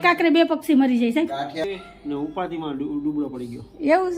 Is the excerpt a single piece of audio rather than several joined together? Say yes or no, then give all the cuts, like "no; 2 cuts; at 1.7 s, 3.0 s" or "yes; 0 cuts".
no; 1 cut; at 1.6 s